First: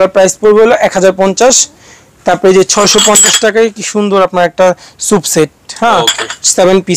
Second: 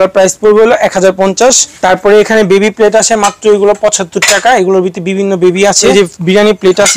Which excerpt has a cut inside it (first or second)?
second